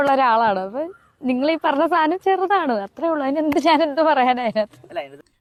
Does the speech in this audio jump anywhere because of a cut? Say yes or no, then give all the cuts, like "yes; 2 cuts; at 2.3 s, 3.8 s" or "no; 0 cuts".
no; 0 cuts